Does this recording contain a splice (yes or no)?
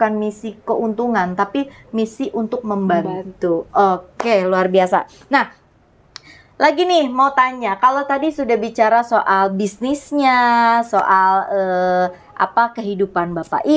no